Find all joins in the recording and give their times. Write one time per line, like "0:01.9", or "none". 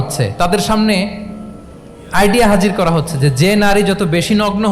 none